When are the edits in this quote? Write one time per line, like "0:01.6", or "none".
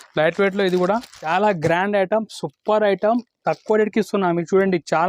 0:01.3